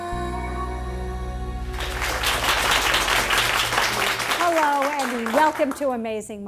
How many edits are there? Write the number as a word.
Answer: one